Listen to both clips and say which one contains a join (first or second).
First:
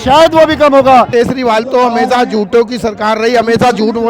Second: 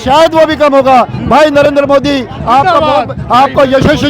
first